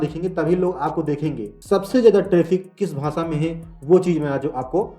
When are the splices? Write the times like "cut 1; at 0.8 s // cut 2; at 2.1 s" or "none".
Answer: cut 1; at 1.5 s